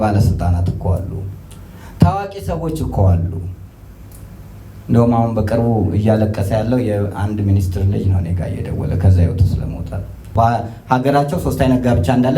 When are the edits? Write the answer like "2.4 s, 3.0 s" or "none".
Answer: 10.2 s